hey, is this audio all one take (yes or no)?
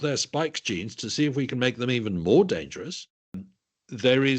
no